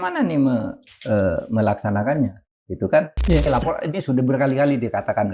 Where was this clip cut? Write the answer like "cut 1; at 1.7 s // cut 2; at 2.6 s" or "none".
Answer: cut 1; at 3.5 s